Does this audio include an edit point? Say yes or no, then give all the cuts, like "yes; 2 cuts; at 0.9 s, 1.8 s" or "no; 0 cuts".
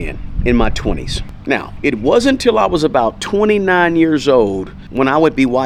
no; 0 cuts